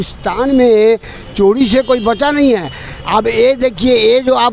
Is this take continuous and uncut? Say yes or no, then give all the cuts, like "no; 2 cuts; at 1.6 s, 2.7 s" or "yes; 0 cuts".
yes; 0 cuts